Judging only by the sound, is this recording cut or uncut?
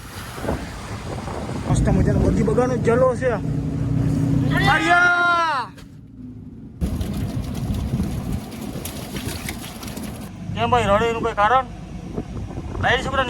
cut